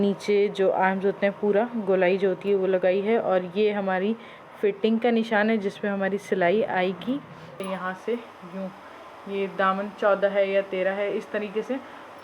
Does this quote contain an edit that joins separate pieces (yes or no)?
yes